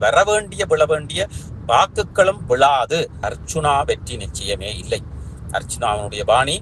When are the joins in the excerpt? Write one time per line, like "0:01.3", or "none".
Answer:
0:03.2

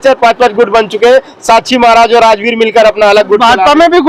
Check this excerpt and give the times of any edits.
none

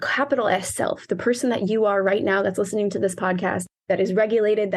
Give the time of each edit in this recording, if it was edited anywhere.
0:03.7

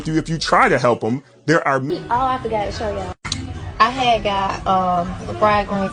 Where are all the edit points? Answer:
0:01.9

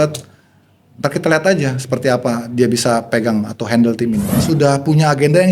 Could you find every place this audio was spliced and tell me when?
0:04.3

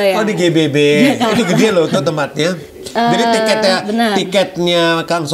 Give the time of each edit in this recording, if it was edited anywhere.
none

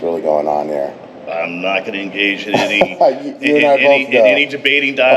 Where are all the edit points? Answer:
none

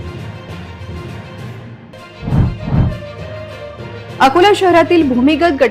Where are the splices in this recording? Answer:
0:01.7

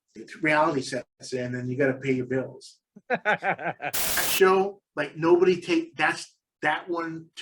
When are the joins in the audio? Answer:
0:04.3

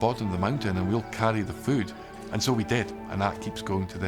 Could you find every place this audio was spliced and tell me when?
0:02.0

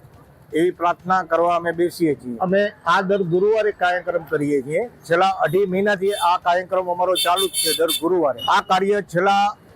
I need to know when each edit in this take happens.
0:02.3
0:08.4

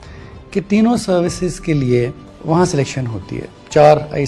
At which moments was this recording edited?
0:02.3

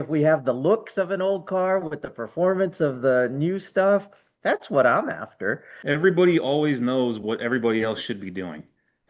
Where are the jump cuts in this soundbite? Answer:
0:05.7

